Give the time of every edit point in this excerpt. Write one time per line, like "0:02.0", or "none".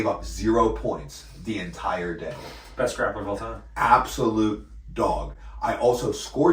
none